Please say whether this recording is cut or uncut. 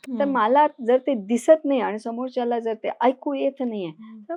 uncut